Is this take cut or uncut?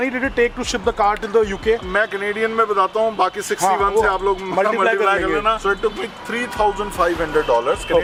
uncut